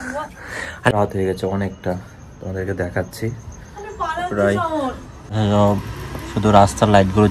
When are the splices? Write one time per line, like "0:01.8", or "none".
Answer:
0:00.9
0:05.3